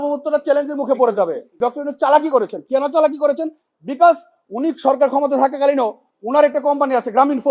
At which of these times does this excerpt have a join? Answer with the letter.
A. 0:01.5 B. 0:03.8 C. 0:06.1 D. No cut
A